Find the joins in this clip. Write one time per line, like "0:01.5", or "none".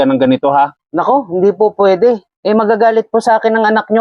0:02.3

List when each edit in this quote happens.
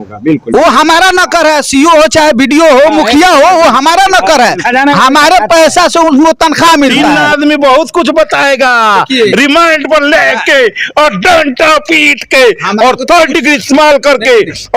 0:07.1

